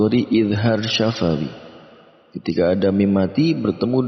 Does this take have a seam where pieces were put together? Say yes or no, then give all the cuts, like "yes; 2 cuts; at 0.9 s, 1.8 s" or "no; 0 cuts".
no; 0 cuts